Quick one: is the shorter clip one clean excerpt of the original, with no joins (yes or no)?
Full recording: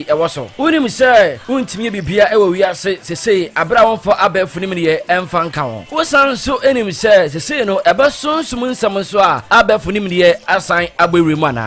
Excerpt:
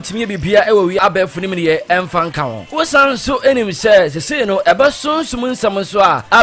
no